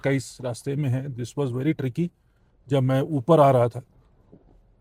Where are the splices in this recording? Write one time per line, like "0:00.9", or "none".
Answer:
none